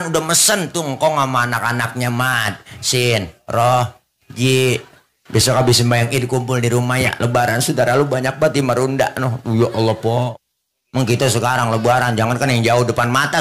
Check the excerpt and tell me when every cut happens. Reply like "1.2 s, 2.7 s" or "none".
10.3 s